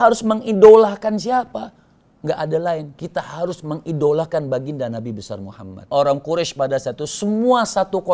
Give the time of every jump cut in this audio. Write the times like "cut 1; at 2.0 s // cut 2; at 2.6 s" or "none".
cut 1; at 5.9 s